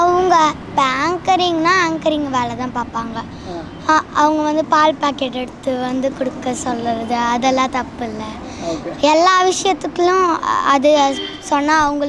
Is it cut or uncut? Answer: uncut